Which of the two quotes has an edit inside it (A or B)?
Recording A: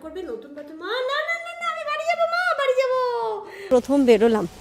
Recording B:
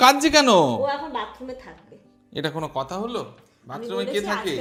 A